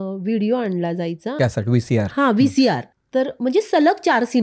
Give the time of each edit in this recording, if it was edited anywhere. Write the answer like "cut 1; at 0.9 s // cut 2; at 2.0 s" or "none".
cut 1; at 1.4 s // cut 2; at 2.9 s